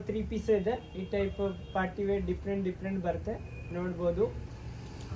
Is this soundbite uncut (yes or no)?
yes